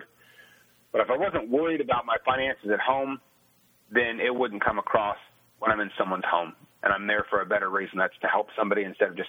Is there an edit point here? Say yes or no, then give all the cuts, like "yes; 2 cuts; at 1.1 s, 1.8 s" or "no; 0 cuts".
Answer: no; 0 cuts